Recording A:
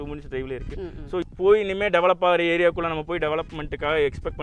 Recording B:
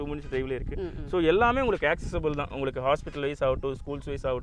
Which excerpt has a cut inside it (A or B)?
A